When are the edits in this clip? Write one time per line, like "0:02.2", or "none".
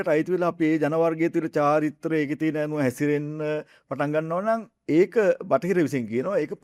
none